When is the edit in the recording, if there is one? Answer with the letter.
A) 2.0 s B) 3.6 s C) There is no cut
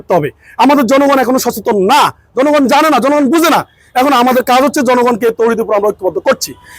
C